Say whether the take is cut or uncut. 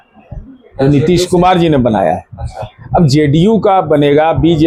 uncut